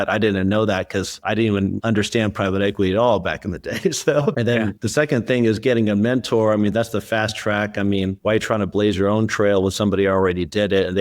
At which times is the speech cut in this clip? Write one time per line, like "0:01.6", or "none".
0:04.7